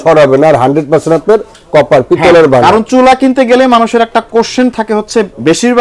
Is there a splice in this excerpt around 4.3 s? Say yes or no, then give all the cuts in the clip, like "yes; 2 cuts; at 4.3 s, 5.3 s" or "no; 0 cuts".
no; 0 cuts